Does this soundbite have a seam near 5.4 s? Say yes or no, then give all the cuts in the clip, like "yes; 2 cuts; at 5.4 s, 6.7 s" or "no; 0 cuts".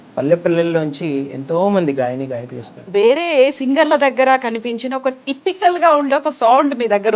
no; 1 cut; at 2.8 s